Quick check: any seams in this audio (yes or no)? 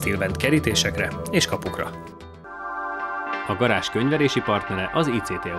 no